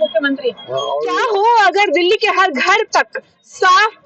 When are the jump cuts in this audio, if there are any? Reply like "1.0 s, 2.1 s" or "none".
1.2 s